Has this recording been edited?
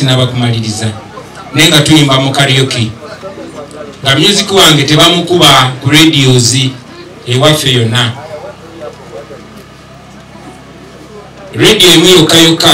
no; 0 cuts

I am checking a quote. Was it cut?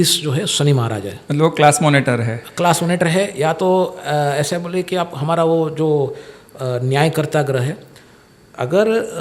no; 0 cuts

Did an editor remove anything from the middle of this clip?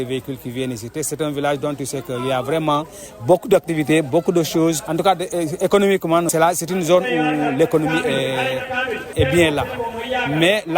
yes; 3 cuts; at 4.8 s, 6.3 s, 9.1 s

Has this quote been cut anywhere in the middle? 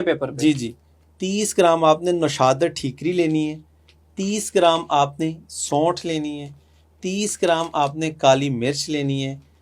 no; 0 cuts

